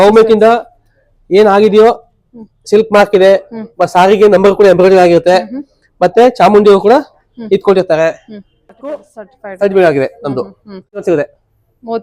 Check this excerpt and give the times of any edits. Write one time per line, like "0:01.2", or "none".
0:09.1
0:11.0